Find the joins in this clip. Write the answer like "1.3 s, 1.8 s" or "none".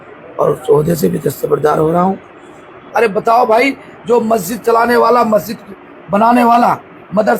2.8 s